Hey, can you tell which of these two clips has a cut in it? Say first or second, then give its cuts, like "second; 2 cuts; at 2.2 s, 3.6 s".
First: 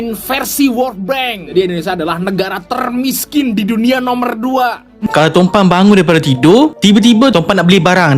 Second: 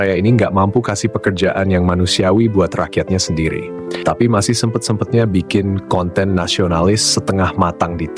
first; 2 cuts; at 1.5 s, 5.1 s